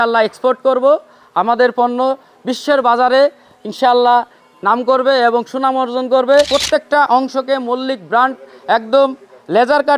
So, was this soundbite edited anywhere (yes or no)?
yes